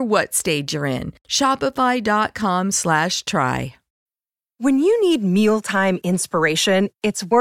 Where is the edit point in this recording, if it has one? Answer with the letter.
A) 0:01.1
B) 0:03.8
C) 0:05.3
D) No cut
B